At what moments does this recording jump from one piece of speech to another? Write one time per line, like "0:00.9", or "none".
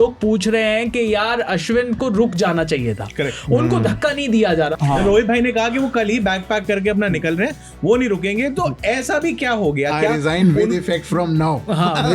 0:04.7